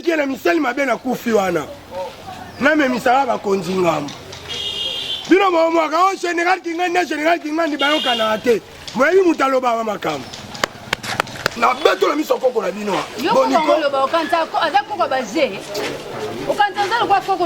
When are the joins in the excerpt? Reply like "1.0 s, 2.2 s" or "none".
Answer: 11.5 s, 13.1 s